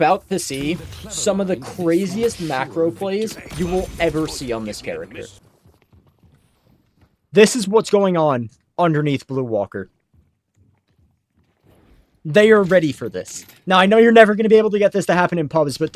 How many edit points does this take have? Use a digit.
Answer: 1